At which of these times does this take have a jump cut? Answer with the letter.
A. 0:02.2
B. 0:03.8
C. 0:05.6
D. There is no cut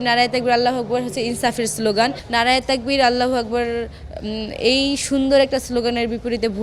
A